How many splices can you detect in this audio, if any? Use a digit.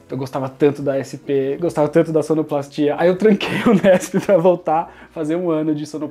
0